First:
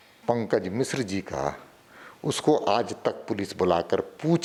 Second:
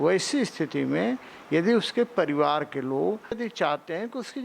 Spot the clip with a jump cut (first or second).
second